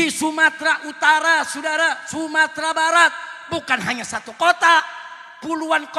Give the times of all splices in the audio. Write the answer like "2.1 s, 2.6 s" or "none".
none